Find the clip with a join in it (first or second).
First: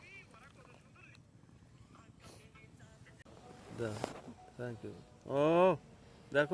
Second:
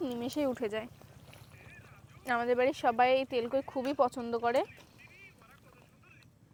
first